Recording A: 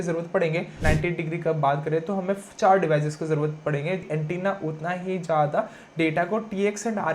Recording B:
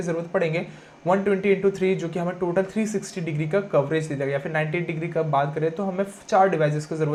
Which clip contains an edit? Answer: A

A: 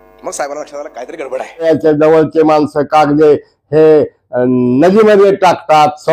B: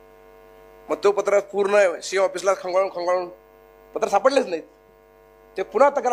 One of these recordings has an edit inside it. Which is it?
A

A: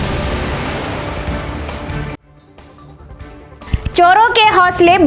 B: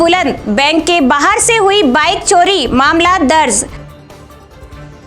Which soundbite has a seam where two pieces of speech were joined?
A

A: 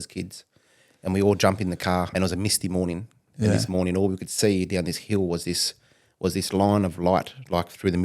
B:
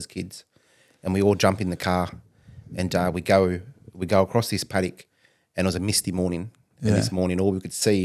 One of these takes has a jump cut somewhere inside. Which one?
A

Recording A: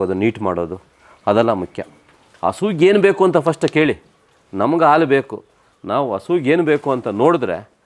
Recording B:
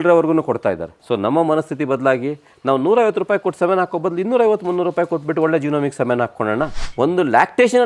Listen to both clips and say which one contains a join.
B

